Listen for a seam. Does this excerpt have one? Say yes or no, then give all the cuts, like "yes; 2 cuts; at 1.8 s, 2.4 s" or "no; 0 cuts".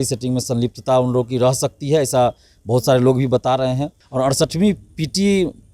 yes; 1 cut; at 4.0 s